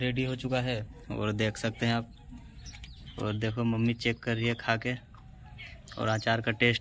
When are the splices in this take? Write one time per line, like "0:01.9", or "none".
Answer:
none